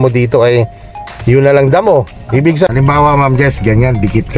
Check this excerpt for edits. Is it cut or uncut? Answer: cut